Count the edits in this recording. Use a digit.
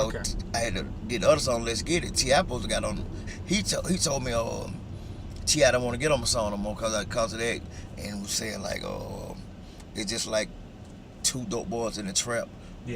1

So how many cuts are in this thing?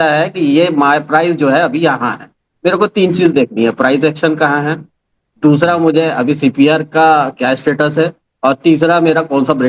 0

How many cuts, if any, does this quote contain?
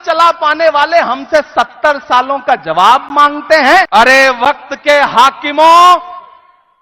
1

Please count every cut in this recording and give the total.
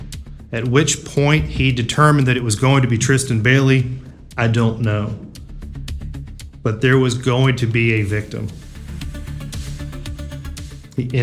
0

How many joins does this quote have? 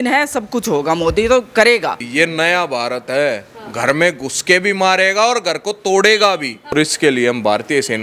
2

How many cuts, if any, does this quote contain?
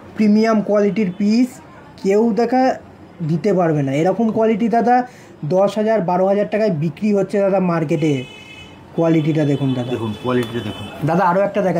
0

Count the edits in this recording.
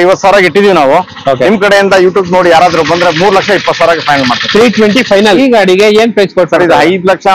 1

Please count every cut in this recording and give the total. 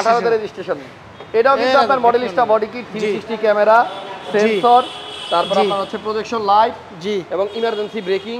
0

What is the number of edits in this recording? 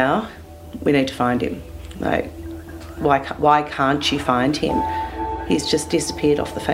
1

